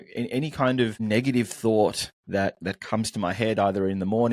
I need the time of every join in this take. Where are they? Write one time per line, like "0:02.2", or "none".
0:01.0
0:02.1